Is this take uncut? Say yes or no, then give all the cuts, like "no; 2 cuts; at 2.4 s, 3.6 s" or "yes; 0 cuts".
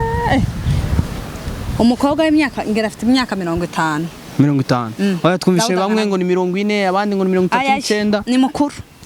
yes; 0 cuts